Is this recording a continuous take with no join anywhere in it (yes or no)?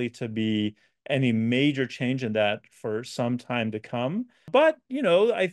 no